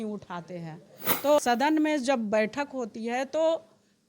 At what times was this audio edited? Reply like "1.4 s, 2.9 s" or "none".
1.4 s